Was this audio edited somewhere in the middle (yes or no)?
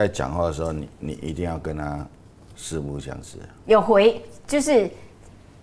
no